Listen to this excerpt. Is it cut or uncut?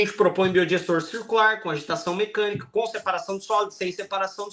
uncut